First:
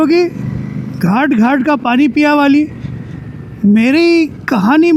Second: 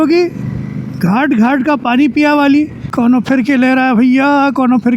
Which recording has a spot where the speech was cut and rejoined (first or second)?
second